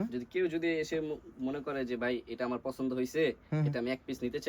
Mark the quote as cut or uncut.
uncut